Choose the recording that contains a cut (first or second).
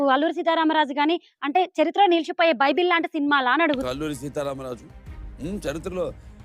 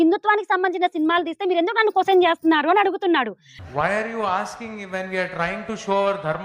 first